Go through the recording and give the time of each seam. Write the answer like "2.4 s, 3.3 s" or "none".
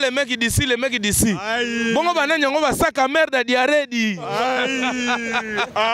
none